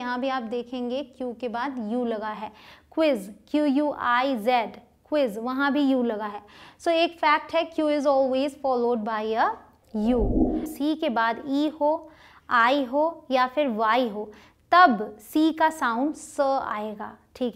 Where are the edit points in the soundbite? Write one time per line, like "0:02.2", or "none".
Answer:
0:10.7